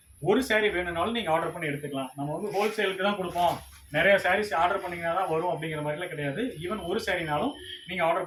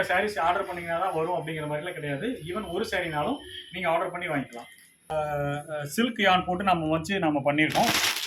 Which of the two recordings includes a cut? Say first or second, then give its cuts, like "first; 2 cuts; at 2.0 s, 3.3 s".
second; 1 cut; at 5.1 s